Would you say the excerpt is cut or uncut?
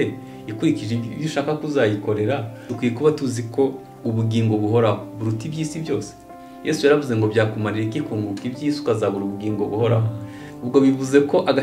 cut